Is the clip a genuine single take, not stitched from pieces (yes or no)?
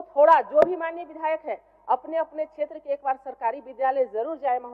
yes